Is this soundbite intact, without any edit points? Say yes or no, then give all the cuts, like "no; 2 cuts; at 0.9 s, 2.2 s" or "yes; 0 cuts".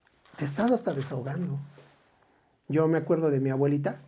yes; 0 cuts